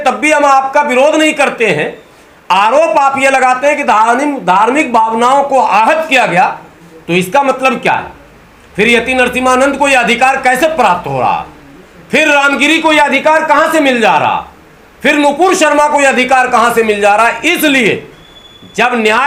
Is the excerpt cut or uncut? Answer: uncut